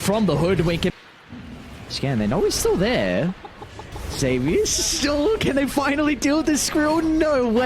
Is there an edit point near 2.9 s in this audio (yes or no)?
no